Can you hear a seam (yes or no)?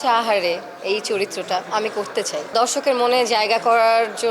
yes